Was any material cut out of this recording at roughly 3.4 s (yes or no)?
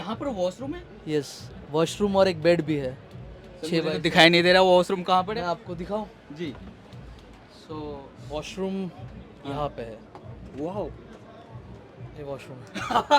no